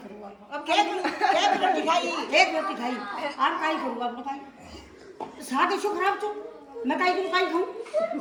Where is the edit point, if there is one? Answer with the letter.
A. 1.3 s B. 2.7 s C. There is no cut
C